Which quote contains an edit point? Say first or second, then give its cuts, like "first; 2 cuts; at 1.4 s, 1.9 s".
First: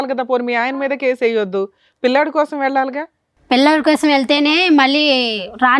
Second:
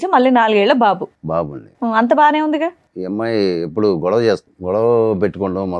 second; 2 cuts; at 2.9 s, 4.5 s